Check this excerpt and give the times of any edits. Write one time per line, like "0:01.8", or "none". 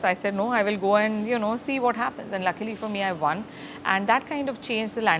none